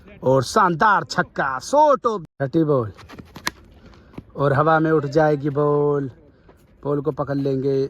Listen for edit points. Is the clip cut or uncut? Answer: cut